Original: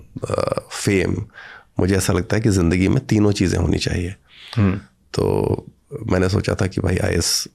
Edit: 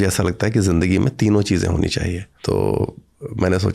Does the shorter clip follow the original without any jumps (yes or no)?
no